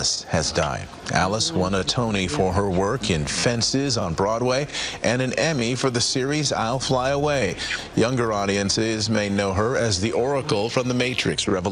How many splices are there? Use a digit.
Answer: 0